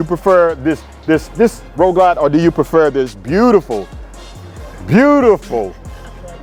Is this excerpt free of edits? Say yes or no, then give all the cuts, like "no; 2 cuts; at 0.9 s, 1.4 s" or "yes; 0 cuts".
yes; 0 cuts